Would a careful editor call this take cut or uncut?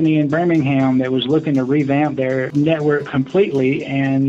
cut